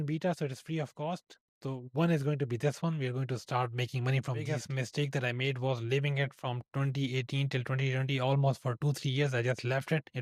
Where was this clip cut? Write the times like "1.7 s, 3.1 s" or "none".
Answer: 4.5 s